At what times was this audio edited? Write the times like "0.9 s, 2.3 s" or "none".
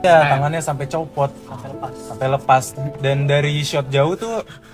2.8 s